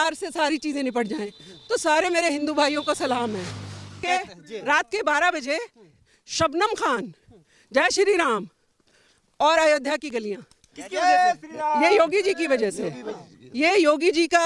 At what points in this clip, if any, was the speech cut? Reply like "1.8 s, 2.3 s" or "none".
4.0 s